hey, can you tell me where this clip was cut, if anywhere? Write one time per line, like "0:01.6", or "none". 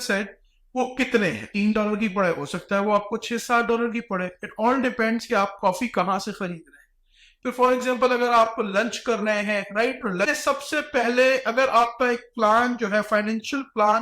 0:01.5
0:10.4